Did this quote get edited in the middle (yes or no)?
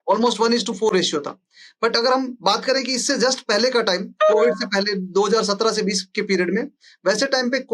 no